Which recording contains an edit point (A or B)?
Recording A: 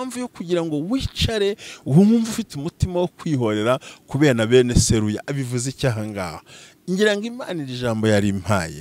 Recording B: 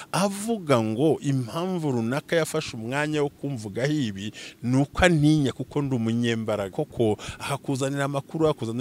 B